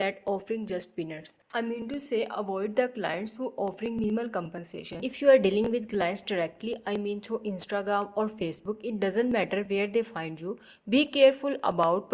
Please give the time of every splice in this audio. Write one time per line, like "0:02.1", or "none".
0:05.0